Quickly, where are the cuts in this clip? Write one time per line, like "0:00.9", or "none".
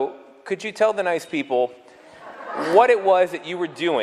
0:01.7

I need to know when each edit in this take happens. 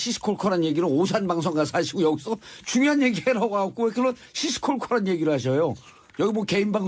0:04.6

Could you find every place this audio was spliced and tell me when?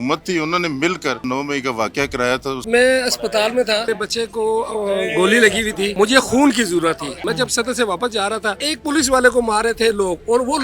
0:01.2
0:02.6
0:03.9
0:05.9
0:07.2
0:08.7

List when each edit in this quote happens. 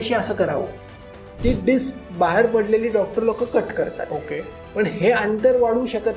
0:00.9

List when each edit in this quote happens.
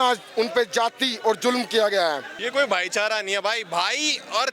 0:02.3

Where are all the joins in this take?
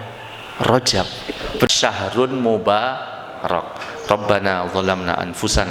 0:01.7

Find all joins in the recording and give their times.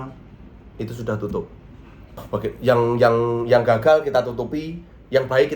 0:02.1

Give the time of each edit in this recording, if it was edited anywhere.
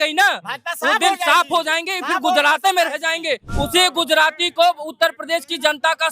0:03.5

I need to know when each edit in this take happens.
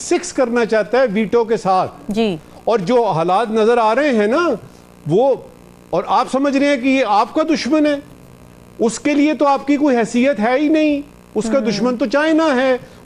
none

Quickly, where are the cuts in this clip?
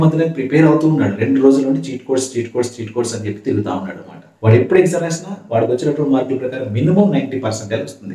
none

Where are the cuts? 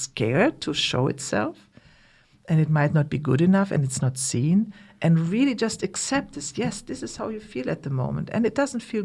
none

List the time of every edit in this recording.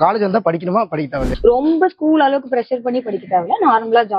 0:01.2

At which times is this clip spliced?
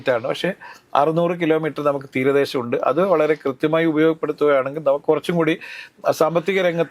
none

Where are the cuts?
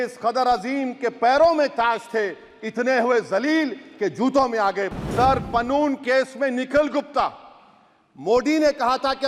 0:04.8

